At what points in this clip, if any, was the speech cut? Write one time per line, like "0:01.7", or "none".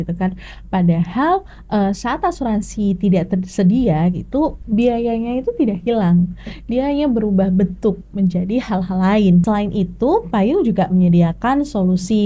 0:09.4

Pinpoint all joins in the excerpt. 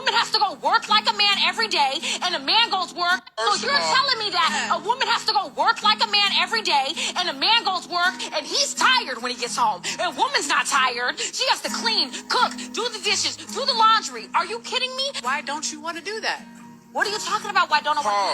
0:03.3

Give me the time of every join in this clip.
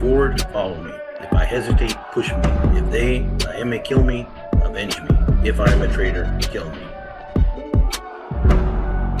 0:07.0

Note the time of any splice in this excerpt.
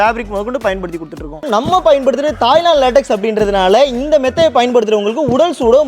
0:01.5

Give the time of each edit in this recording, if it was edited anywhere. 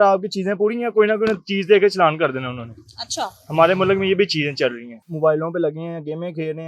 0:05.1

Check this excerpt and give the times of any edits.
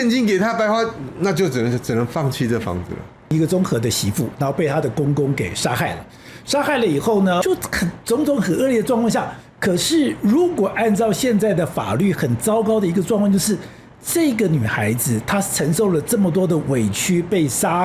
0:03.3
0:07.4

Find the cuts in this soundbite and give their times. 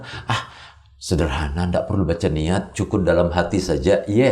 none

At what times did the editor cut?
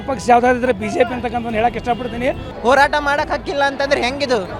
0:02.5

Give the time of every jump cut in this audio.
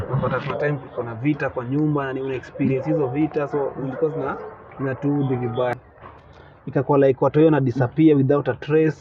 0:05.8

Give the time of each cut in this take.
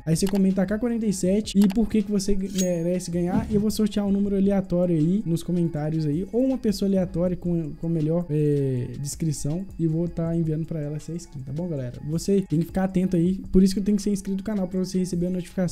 none

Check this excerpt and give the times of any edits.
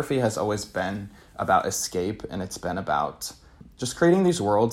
0:03.6

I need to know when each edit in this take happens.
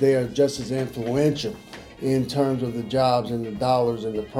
none

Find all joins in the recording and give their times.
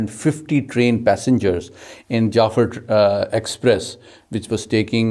none

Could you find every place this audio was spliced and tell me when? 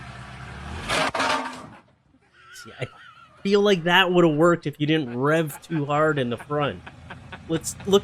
none

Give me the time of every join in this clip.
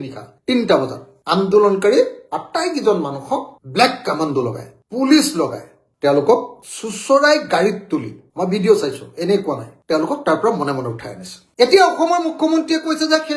none

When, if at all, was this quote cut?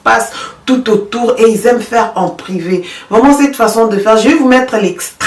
none

